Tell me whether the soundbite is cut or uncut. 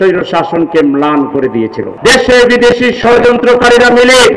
cut